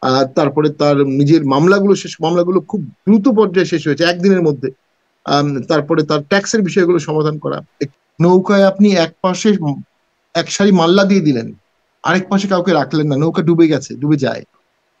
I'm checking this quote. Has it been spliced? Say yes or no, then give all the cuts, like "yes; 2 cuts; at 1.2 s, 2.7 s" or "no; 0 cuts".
yes; 1 cut; at 7.8 s